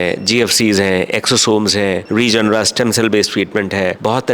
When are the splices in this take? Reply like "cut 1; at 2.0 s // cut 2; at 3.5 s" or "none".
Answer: none

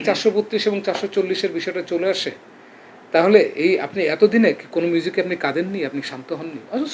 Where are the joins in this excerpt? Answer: none

